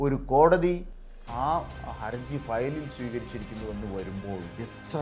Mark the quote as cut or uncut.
uncut